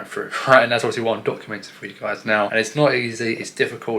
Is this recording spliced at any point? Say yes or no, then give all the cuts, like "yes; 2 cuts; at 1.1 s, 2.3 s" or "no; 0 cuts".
yes; 1 cut; at 2.5 s